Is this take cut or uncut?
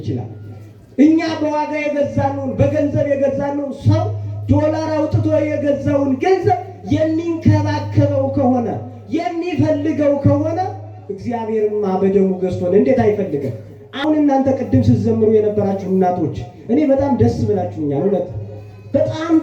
cut